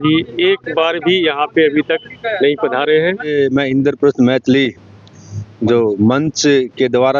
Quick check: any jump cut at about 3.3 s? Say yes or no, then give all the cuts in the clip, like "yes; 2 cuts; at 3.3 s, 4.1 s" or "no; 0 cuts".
yes; 1 cut; at 3.3 s